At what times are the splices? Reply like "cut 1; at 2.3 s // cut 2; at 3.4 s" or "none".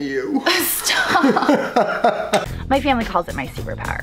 cut 1; at 2.5 s